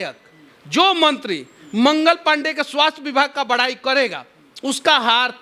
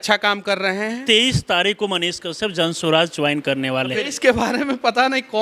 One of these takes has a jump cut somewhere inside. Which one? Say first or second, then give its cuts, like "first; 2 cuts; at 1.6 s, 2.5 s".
second; 2 cuts; at 1.0 s, 4.0 s